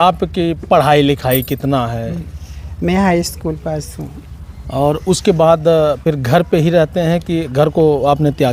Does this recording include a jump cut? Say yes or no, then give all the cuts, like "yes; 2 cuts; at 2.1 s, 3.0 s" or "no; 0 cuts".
no; 0 cuts